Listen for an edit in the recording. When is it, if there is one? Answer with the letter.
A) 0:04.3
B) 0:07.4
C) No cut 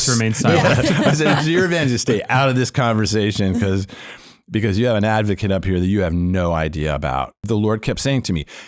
B